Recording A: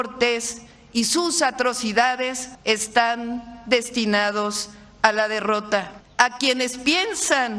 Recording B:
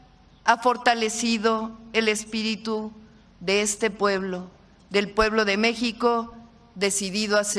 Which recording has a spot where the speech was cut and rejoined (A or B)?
A